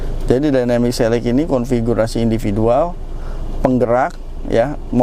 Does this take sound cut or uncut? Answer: uncut